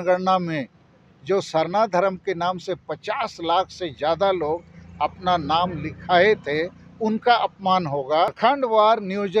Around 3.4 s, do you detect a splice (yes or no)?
no